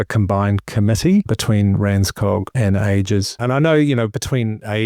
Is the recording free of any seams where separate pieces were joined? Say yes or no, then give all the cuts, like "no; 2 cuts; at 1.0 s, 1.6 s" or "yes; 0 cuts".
no; 3 cuts; at 1.3 s, 2.5 s, 3.3 s